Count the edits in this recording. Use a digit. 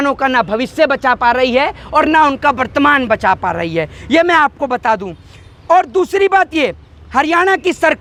0